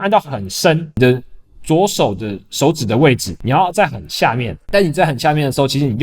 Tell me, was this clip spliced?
yes; 3 cuts; at 1.0 s, 3.3 s, 4.5 s

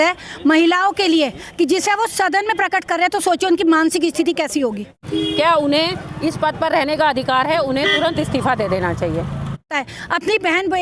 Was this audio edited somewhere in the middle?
yes; 2 cuts; at 5.0 s, 9.7 s

